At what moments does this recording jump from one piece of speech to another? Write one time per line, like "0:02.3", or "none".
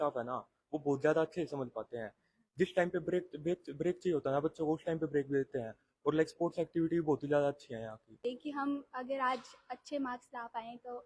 0:08.2